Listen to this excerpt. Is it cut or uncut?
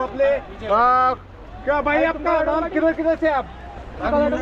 uncut